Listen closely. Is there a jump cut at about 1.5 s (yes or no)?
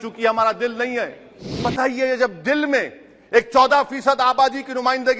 yes